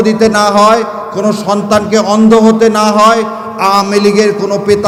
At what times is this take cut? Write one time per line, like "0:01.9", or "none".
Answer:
none